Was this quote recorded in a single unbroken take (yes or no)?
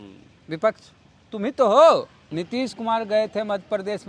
no